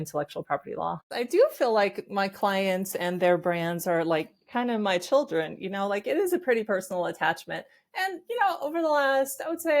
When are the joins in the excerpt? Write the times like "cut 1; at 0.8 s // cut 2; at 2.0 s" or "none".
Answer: cut 1; at 1.1 s